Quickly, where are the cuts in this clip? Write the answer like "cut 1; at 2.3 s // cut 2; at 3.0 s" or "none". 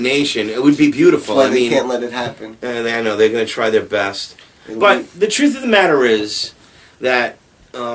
cut 1; at 5.6 s